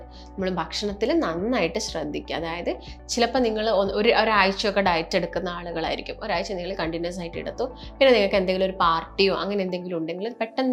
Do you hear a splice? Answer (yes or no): no